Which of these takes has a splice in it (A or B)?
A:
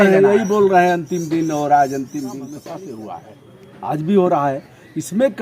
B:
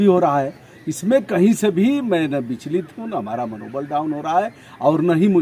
A